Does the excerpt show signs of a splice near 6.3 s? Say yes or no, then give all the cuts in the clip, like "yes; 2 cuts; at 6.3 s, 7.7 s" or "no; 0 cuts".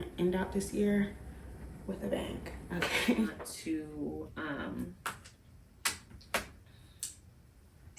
no; 1 cut; at 3.5 s